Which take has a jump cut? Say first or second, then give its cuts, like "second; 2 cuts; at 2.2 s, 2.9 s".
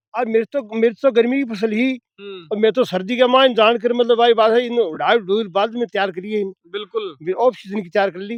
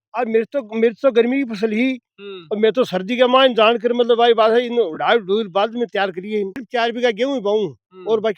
second; 1 cut; at 6.6 s